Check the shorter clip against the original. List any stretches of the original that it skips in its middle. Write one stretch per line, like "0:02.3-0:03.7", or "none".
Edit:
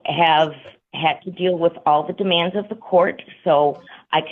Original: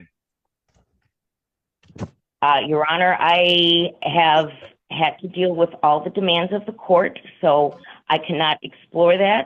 none